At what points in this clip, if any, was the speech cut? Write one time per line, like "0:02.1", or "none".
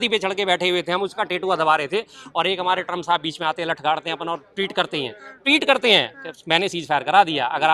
none